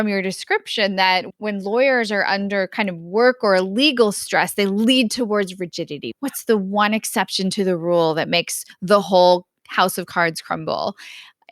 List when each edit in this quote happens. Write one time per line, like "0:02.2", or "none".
0:01.3
0:06.0